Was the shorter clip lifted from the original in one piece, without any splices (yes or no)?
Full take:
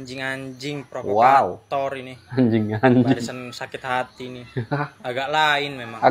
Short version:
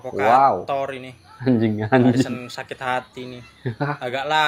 no